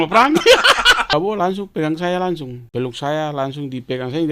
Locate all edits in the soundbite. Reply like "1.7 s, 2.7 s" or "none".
1.1 s, 2.6 s